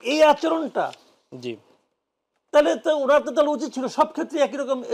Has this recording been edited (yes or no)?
no